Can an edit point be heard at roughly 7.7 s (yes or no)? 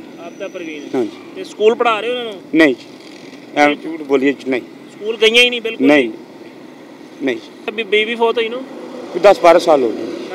yes